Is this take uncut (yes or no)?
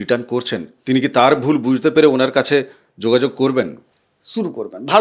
no